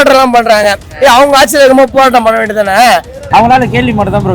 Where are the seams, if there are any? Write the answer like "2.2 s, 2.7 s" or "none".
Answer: 3.1 s